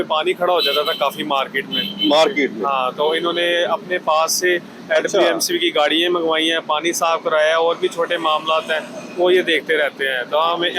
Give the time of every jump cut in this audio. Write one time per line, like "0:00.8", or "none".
none